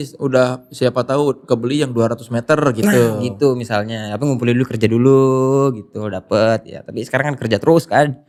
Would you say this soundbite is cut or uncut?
uncut